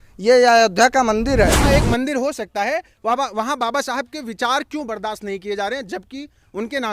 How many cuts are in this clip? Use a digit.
1